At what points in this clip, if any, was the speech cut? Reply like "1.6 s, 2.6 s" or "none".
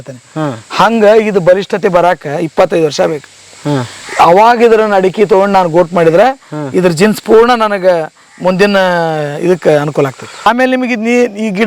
10.5 s